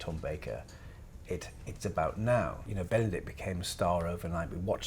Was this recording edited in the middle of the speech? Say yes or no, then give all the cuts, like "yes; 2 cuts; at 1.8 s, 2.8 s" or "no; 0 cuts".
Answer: yes; 1 cut; at 2.7 s